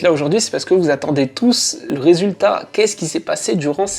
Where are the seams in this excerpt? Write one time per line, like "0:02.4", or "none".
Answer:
0:01.8